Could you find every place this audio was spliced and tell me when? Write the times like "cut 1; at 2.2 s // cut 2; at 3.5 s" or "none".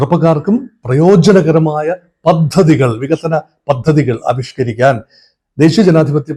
none